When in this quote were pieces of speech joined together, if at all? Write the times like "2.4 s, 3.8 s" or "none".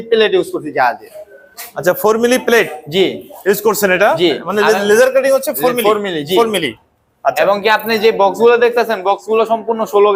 none